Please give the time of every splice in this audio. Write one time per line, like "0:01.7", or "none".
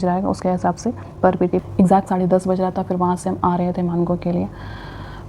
0:01.6